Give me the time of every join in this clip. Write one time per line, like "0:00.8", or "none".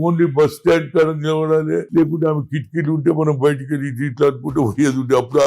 0:01.9